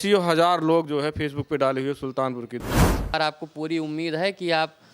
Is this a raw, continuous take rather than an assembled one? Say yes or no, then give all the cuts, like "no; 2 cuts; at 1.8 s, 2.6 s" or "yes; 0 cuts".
no; 1 cut; at 2.6 s